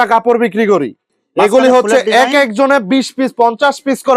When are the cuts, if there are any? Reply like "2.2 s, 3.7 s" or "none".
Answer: 1.0 s